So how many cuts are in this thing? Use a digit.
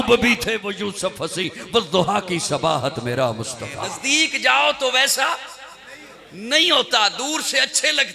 1